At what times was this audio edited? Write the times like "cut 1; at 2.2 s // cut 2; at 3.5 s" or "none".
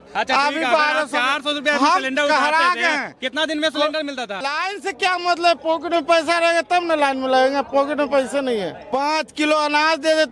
cut 1; at 4.4 s // cut 2; at 8.8 s

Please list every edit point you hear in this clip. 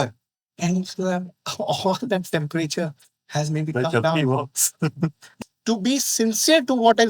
cut 1; at 5.2 s

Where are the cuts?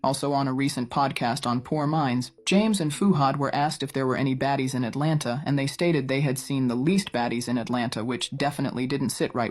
cut 1; at 1.2 s

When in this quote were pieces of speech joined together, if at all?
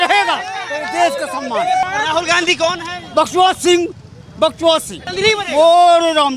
cut 1; at 1.8 s // cut 2; at 5.0 s

